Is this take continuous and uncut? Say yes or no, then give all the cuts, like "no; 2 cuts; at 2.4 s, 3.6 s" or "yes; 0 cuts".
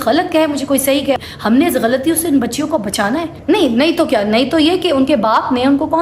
no; 2 cuts; at 1.2 s, 3.3 s